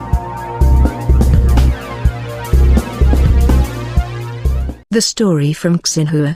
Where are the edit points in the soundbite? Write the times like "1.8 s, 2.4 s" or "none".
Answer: 4.7 s